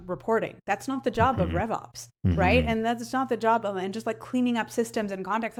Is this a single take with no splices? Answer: yes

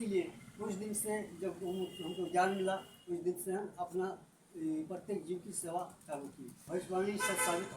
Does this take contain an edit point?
yes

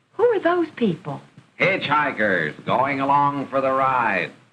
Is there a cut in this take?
no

